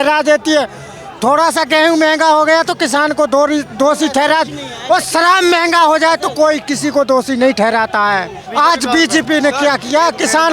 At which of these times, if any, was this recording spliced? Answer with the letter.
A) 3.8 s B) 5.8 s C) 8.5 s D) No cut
C